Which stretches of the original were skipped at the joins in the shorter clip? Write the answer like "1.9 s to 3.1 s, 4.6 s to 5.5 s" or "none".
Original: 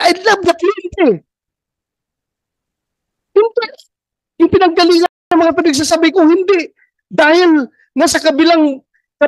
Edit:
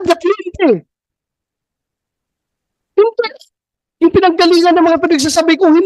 5.1 s to 5.3 s